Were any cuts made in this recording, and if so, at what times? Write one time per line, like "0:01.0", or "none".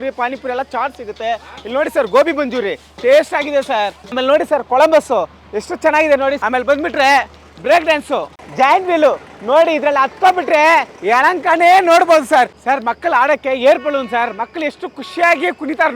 0:04.1
0:08.3
0:12.6